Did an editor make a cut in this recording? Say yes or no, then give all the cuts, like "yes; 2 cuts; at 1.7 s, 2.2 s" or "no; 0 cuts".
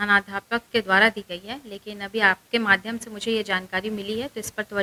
no; 0 cuts